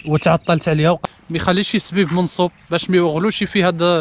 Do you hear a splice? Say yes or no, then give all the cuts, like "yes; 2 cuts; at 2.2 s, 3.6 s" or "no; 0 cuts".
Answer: yes; 1 cut; at 1.0 s